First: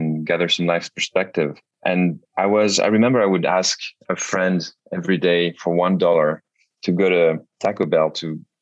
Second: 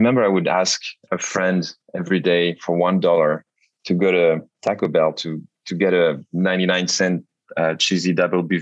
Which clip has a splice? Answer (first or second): first